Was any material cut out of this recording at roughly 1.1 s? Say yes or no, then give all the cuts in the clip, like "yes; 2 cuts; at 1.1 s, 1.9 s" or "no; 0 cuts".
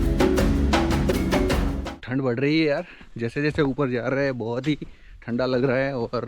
yes; 1 cut; at 1.1 s